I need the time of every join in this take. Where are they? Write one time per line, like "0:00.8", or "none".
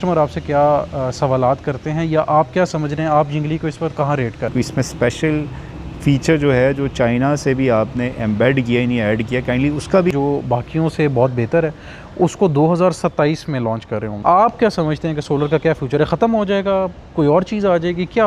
0:04.5
0:10.1
0:14.1